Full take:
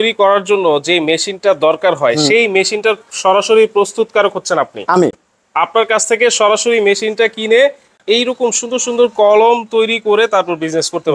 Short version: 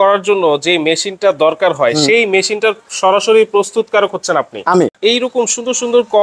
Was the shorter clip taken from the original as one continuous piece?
no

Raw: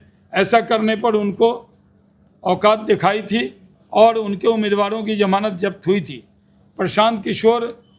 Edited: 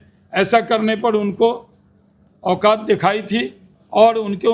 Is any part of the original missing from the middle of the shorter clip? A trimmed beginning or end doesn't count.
no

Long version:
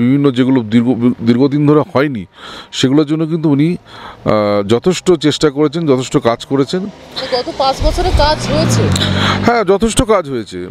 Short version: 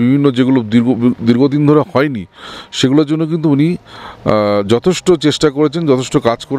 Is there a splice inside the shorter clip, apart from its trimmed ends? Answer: no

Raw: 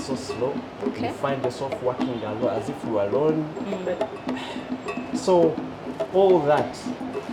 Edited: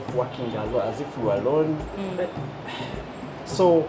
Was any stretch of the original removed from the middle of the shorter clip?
no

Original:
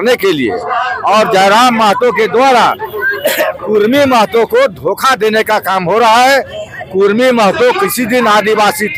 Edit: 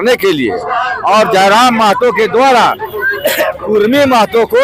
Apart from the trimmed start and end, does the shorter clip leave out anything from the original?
no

